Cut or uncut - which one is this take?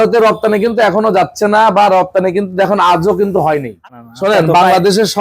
cut